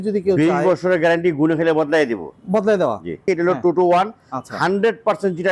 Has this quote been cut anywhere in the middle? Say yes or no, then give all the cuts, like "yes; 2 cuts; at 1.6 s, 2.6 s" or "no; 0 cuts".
yes; 1 cut; at 3.2 s